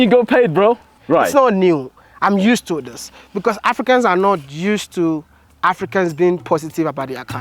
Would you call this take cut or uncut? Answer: cut